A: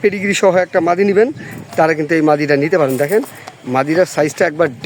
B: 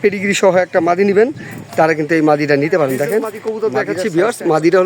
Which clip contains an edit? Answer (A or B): B